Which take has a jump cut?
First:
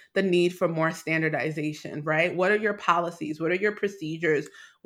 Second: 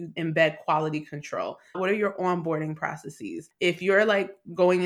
second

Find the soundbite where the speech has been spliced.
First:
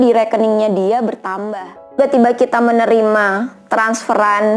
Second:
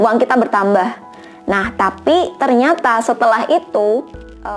first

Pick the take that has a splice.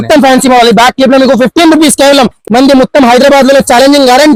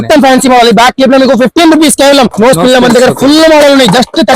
second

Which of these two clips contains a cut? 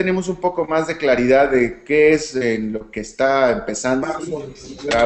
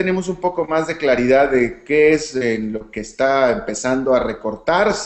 second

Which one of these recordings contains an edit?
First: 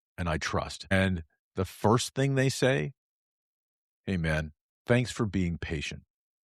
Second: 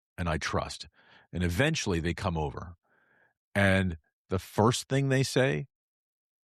first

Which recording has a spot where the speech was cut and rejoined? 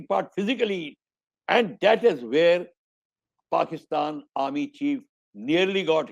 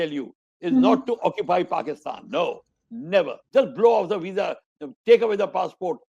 second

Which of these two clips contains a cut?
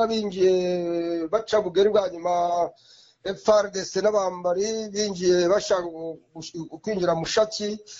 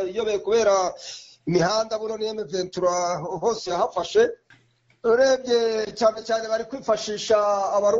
second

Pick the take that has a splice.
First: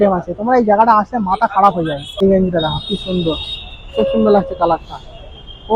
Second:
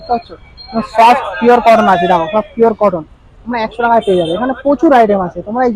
first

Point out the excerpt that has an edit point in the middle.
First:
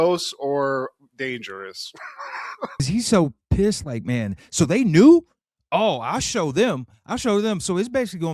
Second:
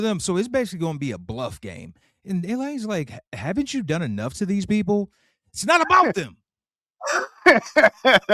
first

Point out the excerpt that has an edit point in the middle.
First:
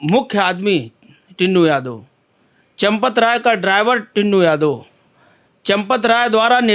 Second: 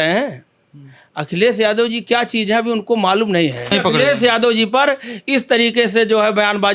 second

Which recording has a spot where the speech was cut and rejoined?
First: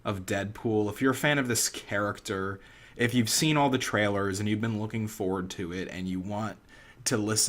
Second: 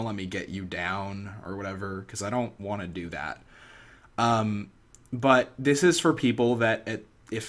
first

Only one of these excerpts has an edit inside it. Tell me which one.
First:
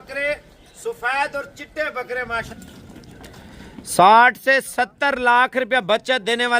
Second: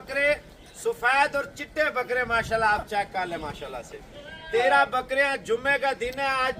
first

